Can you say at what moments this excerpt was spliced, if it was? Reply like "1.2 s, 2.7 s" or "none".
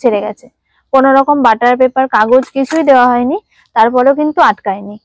none